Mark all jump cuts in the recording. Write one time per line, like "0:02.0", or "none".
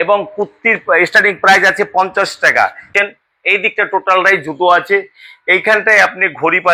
0:02.9